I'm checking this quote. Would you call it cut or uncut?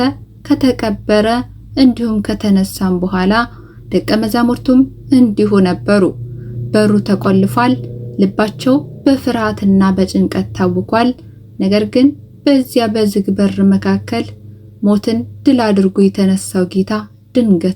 uncut